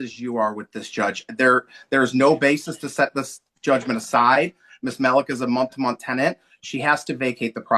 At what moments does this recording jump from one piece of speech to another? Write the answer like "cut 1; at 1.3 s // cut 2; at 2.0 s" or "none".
none

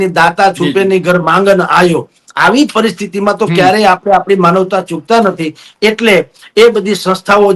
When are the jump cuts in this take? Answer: none

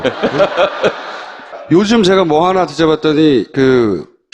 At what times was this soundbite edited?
cut 1; at 1.7 s

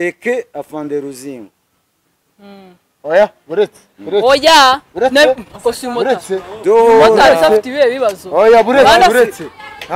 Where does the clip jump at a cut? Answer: none

